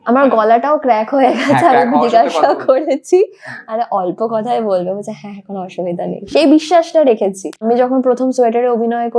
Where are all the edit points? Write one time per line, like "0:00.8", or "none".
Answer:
0:07.0